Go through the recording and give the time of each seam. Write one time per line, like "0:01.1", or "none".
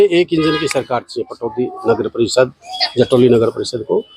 none